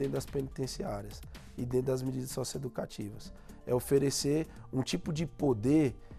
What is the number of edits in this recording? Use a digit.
0